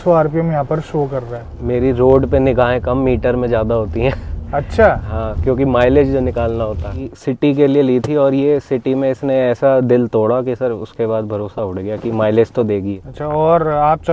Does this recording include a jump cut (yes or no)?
yes